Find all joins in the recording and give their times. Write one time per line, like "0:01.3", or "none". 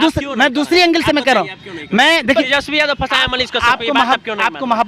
0:02.4